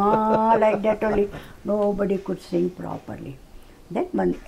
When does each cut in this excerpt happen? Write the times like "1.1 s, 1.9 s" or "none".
none